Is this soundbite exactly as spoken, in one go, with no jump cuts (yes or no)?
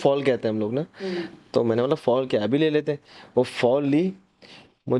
yes